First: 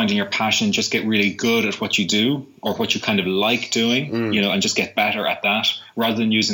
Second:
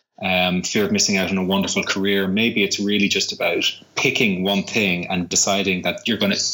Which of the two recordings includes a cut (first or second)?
second